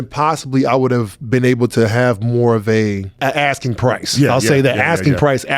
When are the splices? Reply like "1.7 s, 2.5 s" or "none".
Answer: 3.2 s